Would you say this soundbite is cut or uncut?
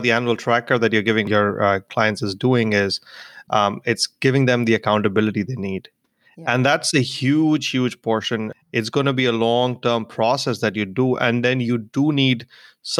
cut